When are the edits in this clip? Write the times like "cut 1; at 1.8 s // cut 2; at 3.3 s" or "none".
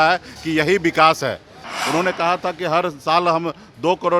cut 1; at 1.7 s